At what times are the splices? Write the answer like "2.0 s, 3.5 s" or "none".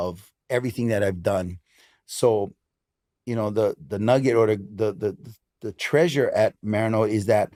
none